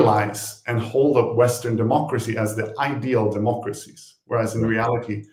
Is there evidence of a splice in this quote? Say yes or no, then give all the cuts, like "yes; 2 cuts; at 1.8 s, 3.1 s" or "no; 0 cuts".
no; 0 cuts